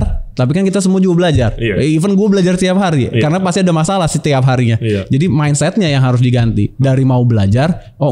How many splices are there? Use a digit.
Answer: 0